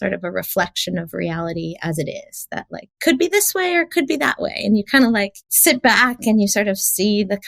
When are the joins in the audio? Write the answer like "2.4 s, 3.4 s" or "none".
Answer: 2.8 s, 5.4 s